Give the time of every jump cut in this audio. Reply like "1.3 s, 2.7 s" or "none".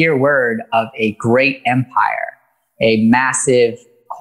none